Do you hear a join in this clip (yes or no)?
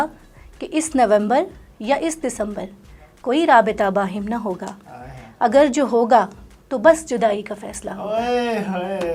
no